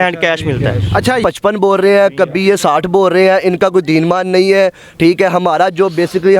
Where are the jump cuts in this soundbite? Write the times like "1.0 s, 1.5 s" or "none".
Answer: 1.2 s